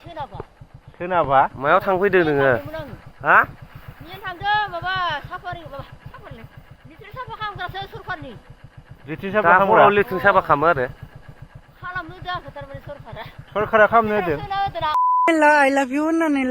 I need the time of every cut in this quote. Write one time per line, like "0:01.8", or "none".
0:15.3